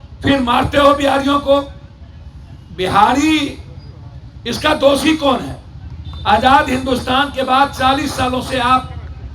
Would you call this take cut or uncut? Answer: uncut